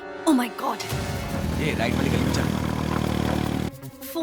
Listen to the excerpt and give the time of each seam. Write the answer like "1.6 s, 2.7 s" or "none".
1.3 s